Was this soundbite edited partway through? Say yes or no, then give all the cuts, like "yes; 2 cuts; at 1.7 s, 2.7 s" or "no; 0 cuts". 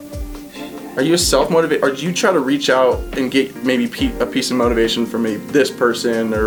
no; 0 cuts